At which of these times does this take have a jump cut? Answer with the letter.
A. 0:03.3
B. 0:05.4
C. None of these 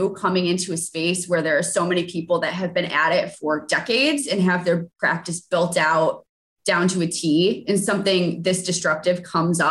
C